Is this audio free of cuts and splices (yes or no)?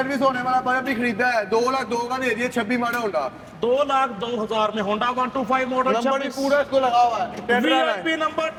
yes